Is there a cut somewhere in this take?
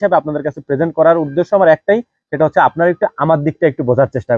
no; 0 cuts

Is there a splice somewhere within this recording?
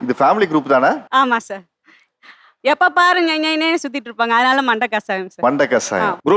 no; 0 cuts

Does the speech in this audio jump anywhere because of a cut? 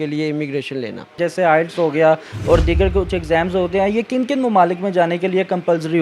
yes; 1 cut; at 1.2 s

